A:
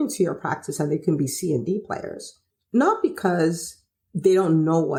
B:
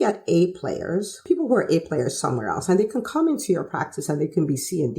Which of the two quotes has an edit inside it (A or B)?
B